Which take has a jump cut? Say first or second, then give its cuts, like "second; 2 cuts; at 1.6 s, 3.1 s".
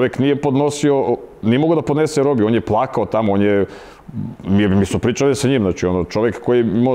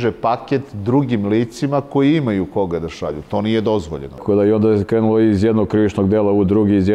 second; 1 cut; at 4.2 s